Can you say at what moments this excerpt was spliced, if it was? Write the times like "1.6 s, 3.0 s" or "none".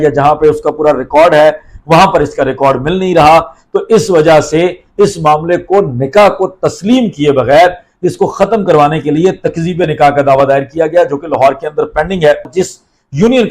12.5 s